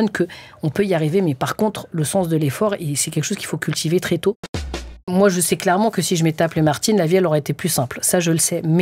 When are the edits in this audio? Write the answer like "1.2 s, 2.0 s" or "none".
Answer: 4.9 s